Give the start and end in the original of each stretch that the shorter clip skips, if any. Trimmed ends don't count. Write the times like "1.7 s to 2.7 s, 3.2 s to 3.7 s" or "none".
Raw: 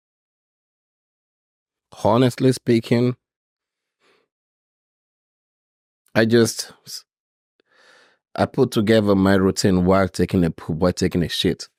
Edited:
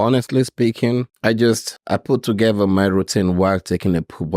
3.2 s to 6.0 s, 6.6 s to 8.2 s